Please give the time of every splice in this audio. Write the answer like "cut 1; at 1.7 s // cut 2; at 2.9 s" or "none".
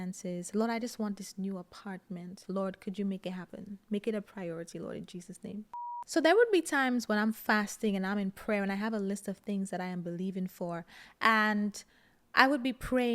cut 1; at 2.4 s // cut 2; at 5.8 s